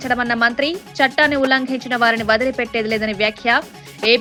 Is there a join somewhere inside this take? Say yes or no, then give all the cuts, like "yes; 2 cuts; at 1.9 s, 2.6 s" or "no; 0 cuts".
no; 0 cuts